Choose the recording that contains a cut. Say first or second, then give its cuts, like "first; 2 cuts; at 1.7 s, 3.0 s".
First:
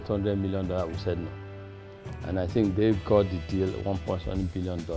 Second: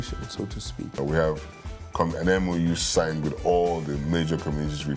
second; 1 cut; at 1.0 s